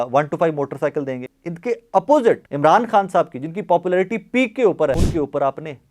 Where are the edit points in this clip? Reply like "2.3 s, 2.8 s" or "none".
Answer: 1.3 s, 2.5 s, 5.0 s